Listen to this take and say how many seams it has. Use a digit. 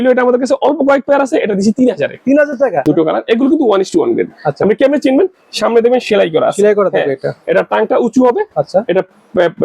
1